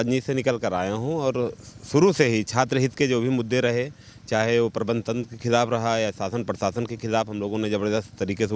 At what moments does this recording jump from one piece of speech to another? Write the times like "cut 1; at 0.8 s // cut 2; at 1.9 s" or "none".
none